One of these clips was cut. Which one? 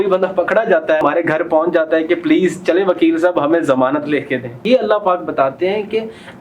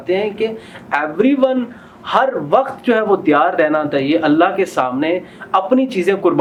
first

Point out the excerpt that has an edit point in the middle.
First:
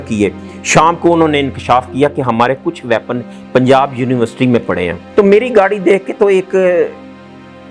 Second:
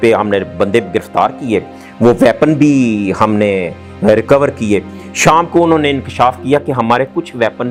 first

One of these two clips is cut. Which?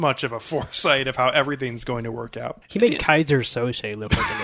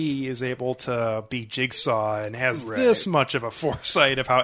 first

